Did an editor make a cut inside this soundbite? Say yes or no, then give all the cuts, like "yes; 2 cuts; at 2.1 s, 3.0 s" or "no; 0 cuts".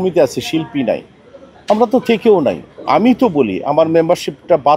no; 0 cuts